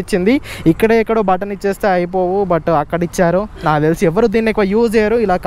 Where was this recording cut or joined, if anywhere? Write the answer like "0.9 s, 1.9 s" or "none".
none